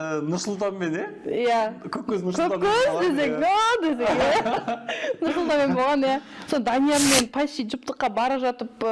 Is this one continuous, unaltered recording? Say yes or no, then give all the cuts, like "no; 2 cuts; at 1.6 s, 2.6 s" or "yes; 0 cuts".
yes; 0 cuts